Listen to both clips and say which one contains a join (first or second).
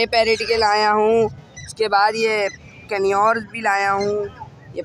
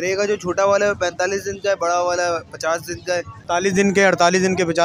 second